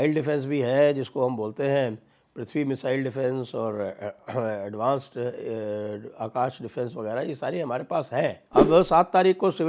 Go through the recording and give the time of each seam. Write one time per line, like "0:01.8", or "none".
0:08.4